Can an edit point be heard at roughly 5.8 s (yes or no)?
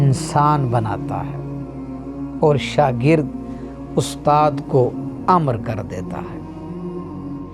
no